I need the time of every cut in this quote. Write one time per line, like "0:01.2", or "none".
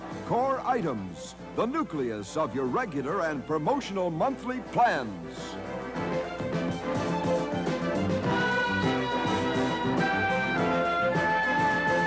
0:10.1